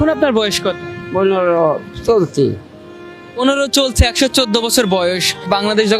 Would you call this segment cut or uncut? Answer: cut